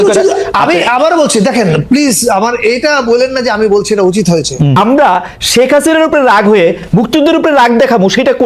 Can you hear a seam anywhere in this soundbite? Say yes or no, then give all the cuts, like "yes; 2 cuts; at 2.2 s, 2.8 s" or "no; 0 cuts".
yes; 1 cut; at 4.7 s